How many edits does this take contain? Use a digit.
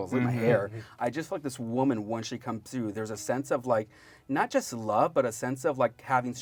0